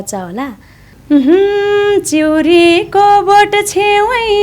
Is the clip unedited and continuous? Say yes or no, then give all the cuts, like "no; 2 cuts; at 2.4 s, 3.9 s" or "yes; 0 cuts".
no; 1 cut; at 1.0 s